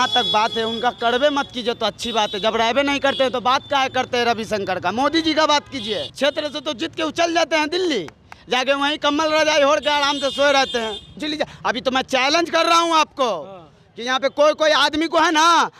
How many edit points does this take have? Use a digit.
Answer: 2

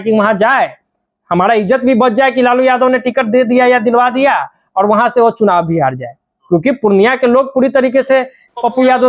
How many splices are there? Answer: 0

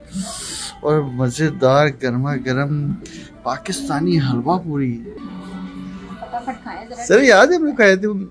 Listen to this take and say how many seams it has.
1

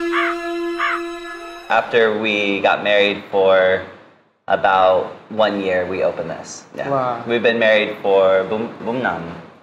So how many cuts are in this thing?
1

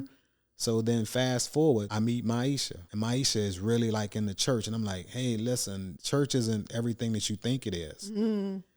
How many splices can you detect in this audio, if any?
3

